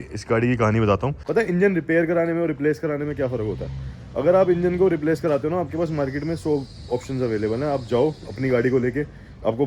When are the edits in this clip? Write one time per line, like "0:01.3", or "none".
0:01.2

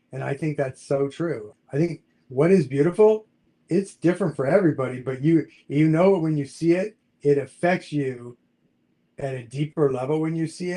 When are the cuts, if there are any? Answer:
0:01.5

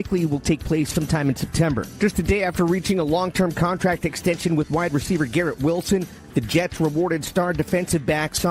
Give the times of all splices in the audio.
0:01.9

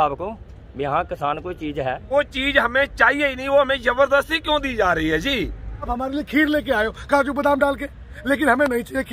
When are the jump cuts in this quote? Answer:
0:02.1
0:05.9

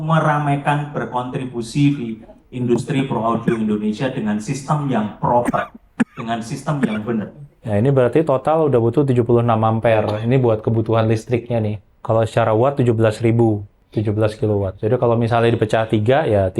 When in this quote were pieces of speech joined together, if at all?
0:07.5
0:11.9
0:13.8
0:14.8

